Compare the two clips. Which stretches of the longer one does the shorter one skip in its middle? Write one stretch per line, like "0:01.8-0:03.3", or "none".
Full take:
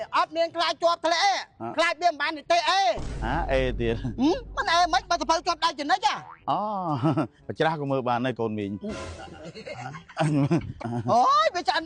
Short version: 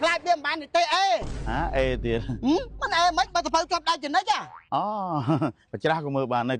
none